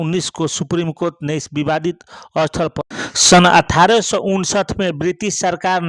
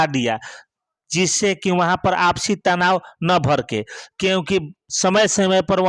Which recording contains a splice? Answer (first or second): first